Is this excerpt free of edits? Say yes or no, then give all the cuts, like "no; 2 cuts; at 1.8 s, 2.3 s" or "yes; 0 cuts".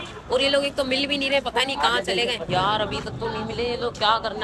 no; 1 cut; at 2.5 s